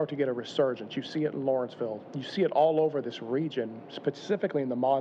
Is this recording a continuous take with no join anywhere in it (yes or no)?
no